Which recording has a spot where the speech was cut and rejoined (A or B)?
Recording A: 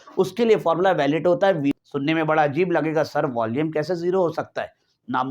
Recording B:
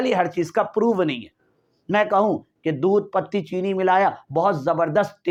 A